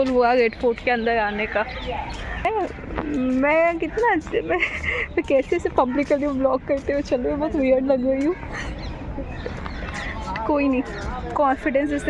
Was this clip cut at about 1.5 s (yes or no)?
no